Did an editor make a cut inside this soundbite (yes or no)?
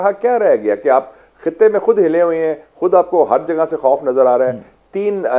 no